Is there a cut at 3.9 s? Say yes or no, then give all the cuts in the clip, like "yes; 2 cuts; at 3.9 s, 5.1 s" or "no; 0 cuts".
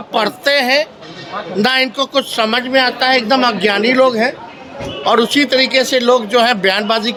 no; 0 cuts